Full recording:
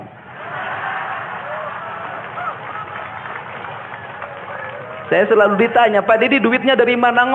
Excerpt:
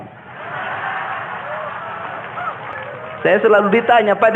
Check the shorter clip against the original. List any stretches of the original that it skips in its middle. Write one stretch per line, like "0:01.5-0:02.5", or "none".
0:02.7-0:04.6

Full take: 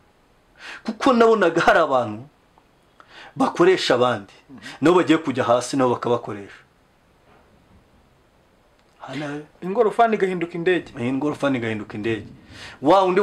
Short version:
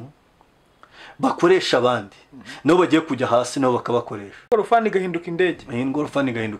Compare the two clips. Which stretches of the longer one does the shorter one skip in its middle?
0:06.6-0:09.7

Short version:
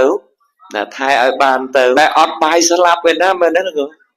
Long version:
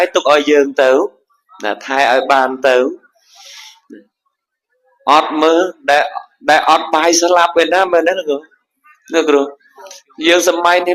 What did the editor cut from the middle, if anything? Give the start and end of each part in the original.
0:02.8-0:06.5

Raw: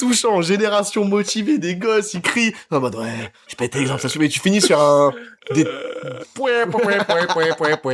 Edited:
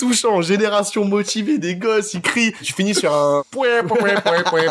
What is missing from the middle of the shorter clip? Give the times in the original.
0:02.7-0:04.3
0:05.2-0:06.3

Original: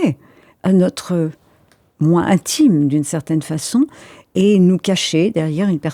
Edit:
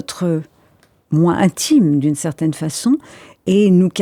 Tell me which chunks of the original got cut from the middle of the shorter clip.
none

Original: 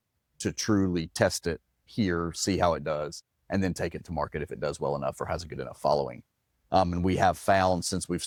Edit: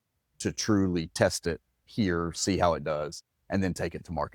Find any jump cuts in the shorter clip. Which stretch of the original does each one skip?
none

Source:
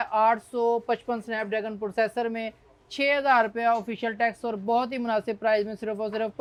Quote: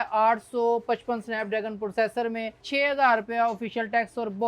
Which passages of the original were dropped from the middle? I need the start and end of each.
0:02.6-0:02.8

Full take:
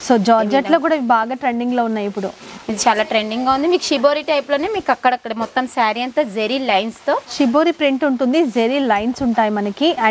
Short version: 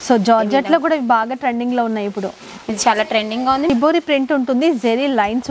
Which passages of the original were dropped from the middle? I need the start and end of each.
0:03.7-0:07.4

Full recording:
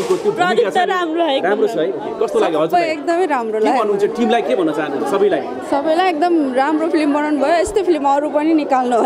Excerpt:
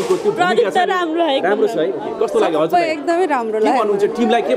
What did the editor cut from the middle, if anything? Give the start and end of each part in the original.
none

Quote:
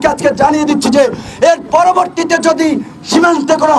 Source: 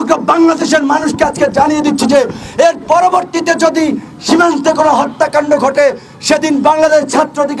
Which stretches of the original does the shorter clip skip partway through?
none

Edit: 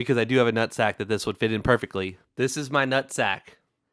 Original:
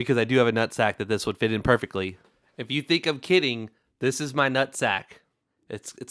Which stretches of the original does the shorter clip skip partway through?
0:02.2-0:03.8

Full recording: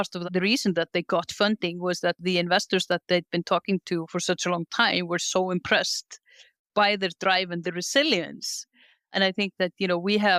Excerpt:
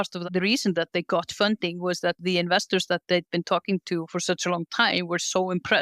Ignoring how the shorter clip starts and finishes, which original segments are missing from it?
none

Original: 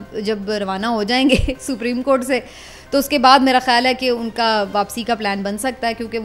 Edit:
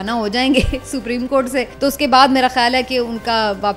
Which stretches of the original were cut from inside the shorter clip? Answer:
0:02.5-0:02.8

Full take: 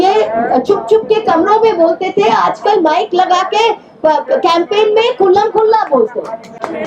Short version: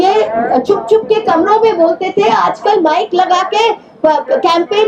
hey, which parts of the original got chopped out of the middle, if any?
none

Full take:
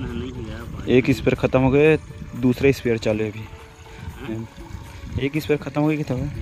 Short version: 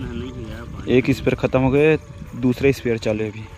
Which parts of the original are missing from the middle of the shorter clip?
none

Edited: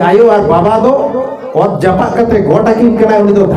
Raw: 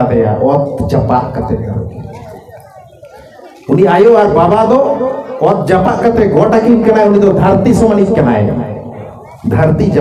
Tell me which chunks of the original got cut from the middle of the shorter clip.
none

